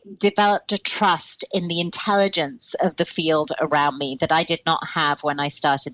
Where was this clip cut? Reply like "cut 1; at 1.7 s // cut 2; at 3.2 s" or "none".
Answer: none